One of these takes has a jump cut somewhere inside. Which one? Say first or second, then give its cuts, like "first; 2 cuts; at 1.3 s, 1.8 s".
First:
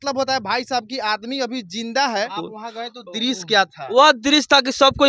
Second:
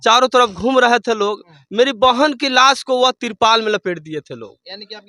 first; 1 cut; at 2.4 s